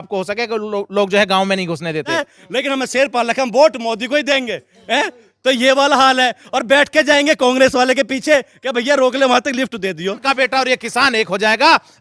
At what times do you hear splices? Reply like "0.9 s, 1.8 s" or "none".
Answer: 2.3 s, 10.2 s